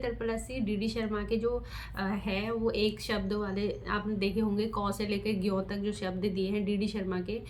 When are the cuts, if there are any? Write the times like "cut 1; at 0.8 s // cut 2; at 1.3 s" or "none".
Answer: none